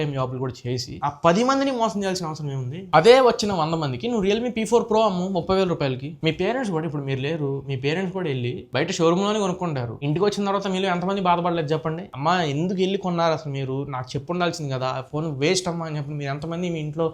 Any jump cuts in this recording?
yes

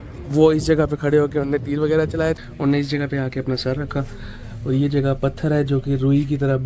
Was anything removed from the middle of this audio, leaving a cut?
yes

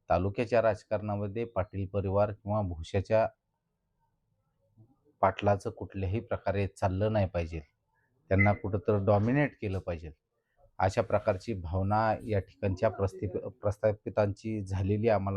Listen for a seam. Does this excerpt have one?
no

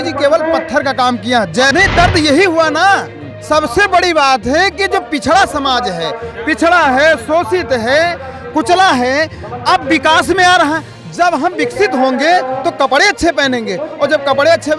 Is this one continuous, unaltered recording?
no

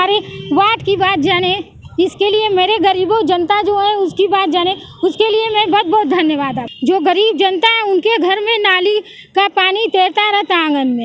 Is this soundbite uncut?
no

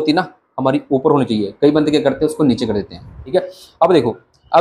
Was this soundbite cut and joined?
yes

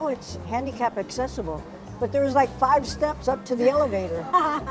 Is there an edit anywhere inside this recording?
no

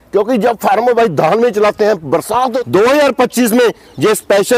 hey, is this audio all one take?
no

